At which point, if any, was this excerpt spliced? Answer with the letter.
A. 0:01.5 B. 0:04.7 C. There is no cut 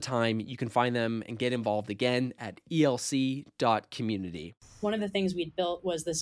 B